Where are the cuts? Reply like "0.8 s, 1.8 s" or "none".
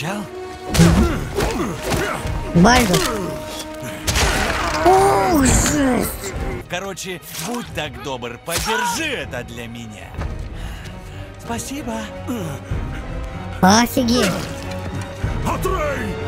6.6 s